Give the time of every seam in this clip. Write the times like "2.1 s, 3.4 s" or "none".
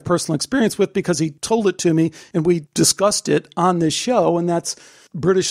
1.4 s, 2.5 s